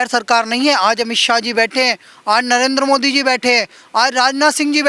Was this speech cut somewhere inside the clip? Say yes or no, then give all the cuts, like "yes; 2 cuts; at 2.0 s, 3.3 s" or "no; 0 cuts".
no; 0 cuts